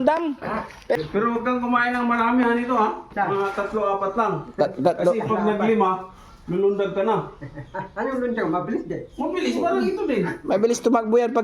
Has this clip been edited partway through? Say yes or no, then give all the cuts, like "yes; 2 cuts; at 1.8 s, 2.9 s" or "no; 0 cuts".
yes; 1 cut; at 0.9 s